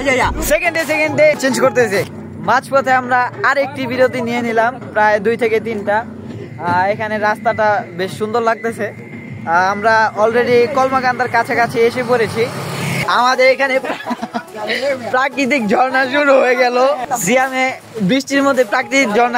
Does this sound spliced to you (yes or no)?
yes